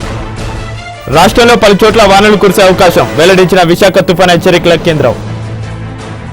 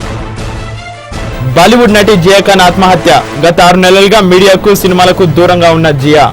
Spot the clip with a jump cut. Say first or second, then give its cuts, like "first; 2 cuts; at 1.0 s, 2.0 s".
second; 1 cut; at 1.0 s